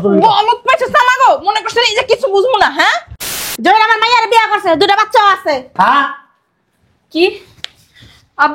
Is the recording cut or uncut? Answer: cut